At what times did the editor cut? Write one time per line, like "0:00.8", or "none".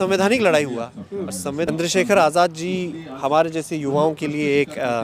0:01.7

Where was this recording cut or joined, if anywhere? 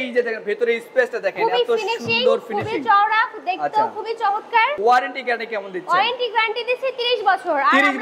0:04.8

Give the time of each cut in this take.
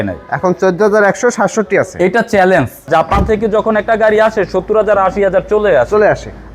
0:02.9

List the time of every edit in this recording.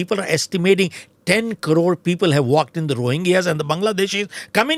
none

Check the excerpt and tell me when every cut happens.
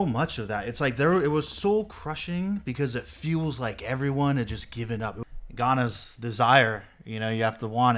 0:05.2

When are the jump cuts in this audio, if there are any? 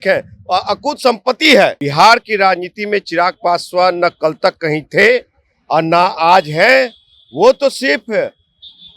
0:01.8

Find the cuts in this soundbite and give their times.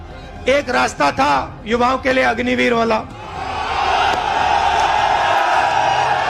none

